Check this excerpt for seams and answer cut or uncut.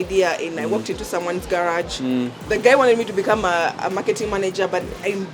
cut